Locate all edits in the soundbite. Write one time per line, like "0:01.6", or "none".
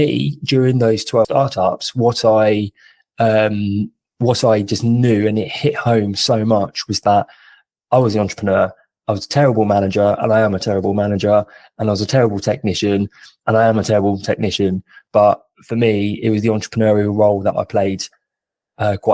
0:01.1